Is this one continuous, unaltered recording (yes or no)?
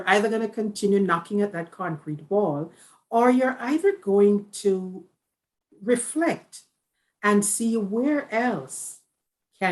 yes